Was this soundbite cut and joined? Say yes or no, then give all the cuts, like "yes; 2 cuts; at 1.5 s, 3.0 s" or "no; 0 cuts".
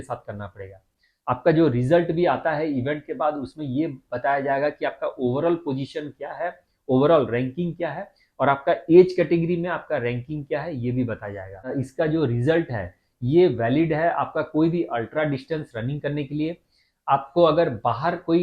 yes; 1 cut; at 11.7 s